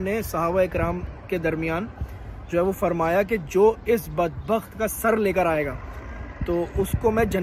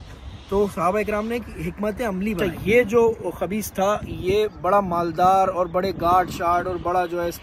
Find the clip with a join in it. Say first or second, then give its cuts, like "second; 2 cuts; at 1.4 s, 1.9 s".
second; 1 cut; at 2.4 s